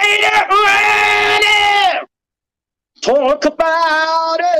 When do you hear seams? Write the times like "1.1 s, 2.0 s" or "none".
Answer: none